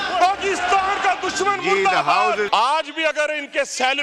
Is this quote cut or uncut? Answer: cut